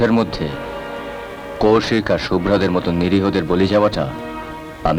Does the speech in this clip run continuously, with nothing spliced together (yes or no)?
yes